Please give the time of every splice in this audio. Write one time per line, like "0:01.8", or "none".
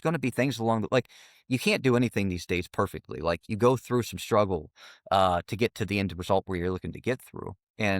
0:03.4